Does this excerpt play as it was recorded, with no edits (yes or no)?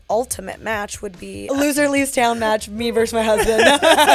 no